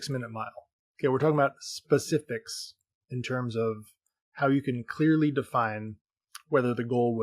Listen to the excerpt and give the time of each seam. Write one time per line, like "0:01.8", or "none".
none